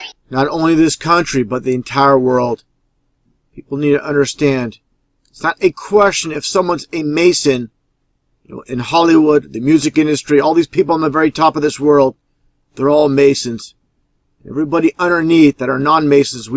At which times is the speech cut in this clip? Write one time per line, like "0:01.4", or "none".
0:07.2